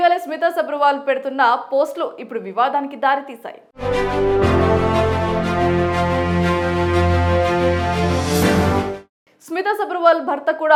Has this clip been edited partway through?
no; 0 cuts

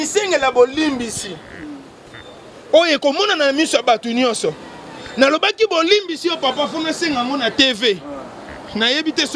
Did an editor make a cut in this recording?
no; 0 cuts

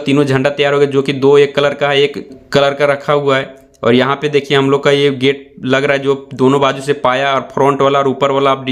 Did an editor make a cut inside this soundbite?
no; 0 cuts

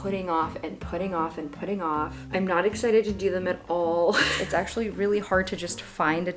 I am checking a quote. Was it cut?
yes; 1 cut; at 4.4 s

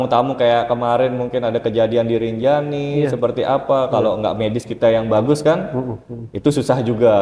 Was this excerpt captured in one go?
yes; 0 cuts

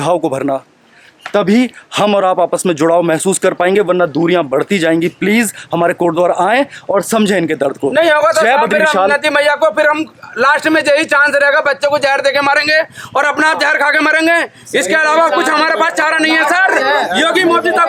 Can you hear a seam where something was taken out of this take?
no; 0 cuts

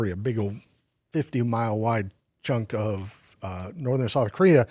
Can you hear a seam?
no; 0 cuts

